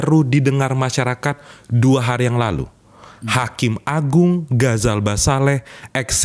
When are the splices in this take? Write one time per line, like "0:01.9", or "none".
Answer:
none